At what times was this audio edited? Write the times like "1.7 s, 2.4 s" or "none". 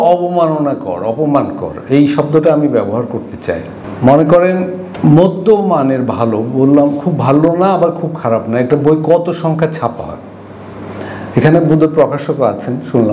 none